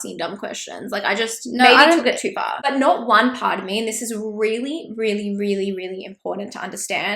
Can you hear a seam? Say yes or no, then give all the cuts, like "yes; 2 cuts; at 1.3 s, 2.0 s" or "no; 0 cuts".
yes; 1 cut; at 2.4 s